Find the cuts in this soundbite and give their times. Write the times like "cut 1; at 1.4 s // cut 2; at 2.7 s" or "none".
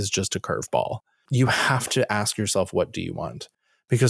cut 1; at 1.2 s